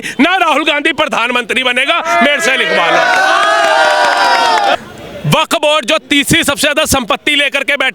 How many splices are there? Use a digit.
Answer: 1